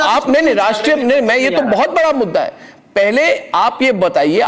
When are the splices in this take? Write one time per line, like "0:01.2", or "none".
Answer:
none